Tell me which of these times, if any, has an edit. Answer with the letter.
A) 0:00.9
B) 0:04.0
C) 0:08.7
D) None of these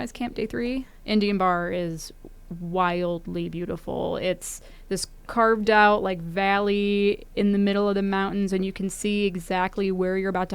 A